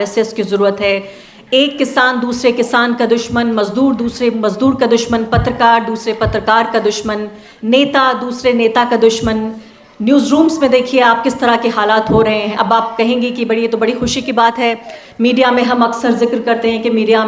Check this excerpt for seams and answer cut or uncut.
uncut